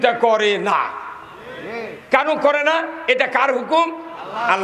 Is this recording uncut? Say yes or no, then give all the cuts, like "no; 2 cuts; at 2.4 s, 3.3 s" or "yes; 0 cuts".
yes; 0 cuts